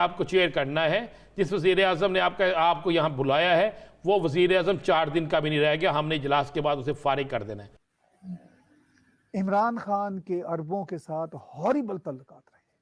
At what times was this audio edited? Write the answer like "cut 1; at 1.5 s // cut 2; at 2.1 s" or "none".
cut 1; at 7.6 s